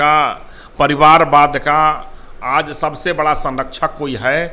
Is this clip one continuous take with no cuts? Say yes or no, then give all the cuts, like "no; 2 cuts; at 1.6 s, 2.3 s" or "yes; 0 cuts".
yes; 0 cuts